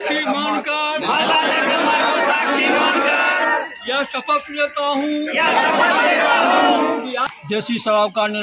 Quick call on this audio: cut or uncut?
cut